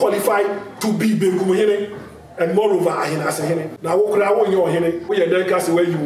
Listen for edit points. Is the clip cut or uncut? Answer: cut